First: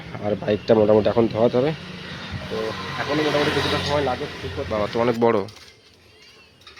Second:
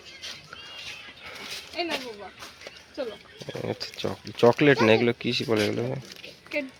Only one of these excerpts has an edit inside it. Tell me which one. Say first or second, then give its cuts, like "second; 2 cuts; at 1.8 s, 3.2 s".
first; 1 cut; at 4.2 s